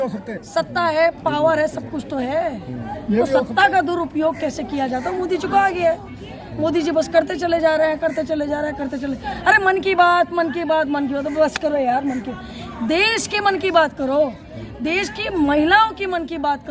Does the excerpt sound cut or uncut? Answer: uncut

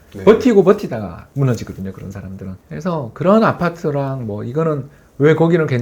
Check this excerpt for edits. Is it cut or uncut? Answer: cut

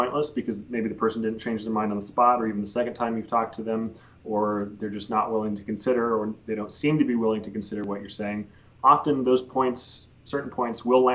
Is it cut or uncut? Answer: uncut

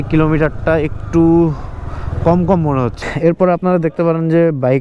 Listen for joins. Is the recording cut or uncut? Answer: cut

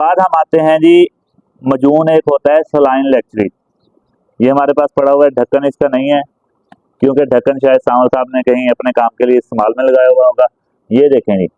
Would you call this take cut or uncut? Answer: uncut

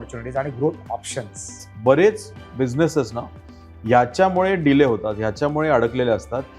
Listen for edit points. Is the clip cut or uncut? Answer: cut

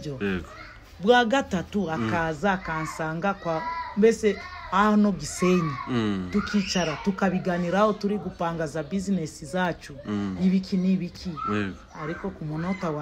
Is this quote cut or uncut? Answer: uncut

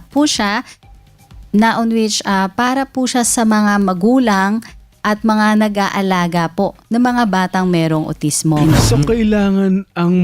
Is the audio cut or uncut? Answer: cut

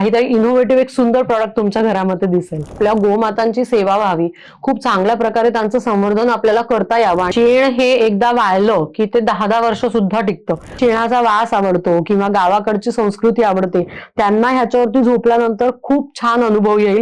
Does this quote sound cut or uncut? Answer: cut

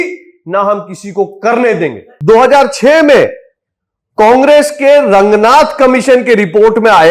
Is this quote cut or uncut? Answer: cut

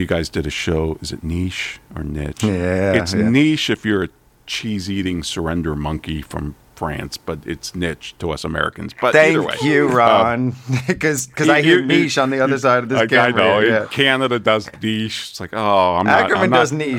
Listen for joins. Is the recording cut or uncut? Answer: uncut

